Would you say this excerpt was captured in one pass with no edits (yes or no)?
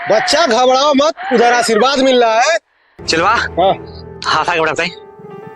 no